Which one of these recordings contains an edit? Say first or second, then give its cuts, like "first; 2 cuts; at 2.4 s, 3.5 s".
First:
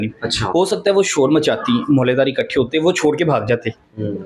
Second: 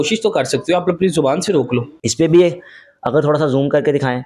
second; 1 cut; at 2.0 s